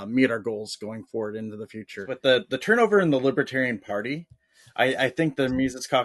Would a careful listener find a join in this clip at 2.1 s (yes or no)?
yes